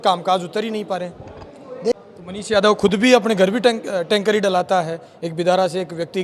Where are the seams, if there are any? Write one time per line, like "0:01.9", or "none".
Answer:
0:02.0